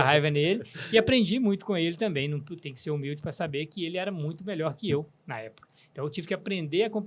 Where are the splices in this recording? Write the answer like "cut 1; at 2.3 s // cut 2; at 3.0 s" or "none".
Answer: none